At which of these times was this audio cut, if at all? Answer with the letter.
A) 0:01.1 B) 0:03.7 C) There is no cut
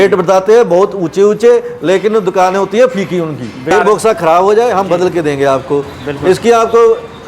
B